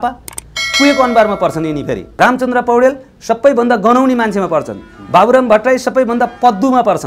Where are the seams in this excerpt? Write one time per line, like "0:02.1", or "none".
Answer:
0:02.2